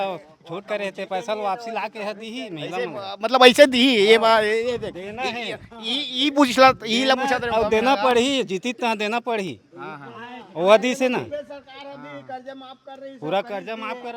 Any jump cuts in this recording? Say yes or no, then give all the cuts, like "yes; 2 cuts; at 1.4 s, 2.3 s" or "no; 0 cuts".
no; 0 cuts